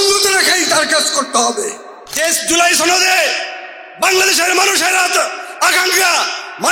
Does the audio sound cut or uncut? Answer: cut